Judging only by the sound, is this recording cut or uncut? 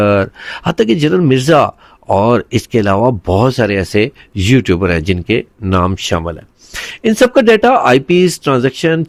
uncut